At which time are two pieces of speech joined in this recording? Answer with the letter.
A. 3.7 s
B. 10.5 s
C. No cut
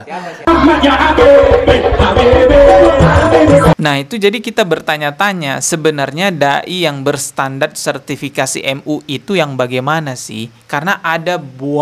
A